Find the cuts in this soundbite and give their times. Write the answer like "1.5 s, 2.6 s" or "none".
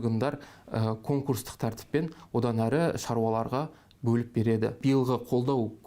4.8 s